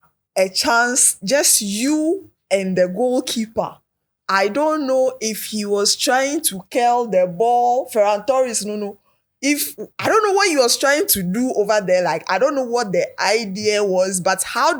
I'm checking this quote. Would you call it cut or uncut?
uncut